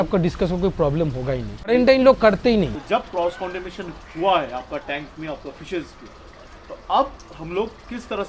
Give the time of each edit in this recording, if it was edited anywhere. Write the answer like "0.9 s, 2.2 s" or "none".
1.7 s, 2.8 s